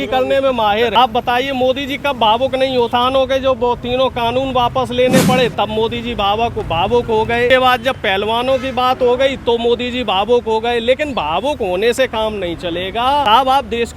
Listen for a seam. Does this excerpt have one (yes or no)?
yes